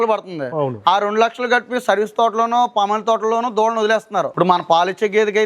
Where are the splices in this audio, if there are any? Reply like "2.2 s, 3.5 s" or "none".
4.3 s